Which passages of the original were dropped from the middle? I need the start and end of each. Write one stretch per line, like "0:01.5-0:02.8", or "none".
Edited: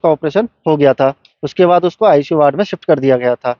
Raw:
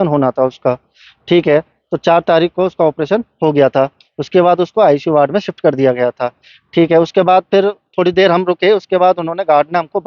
none